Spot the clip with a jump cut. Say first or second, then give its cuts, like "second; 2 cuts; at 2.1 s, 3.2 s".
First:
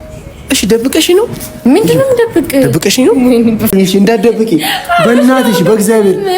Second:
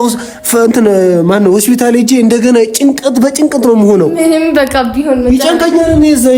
first; 1 cut; at 3.7 s